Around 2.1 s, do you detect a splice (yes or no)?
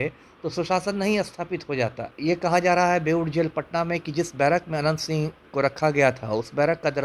yes